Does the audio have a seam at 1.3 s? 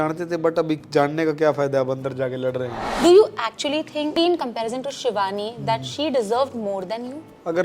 no; 2 cuts; at 2.8 s, 4.2 s

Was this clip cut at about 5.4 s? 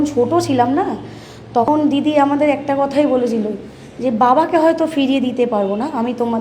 no; 1 cut; at 1.7 s

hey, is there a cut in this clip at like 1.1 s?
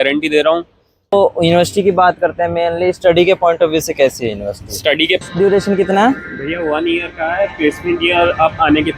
yes; 2 cuts; at 1.1 s, 5.3 s

